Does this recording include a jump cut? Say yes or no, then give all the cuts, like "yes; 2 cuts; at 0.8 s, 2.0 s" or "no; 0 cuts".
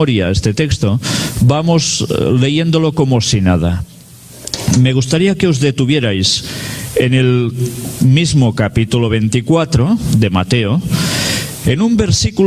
yes; 1 cut; at 5.9 s